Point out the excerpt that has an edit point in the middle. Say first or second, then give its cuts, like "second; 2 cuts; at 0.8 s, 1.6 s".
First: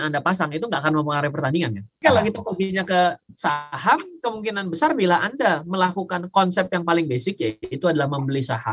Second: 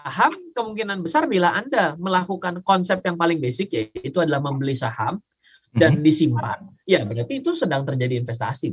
first; 1 cut; at 2.0 s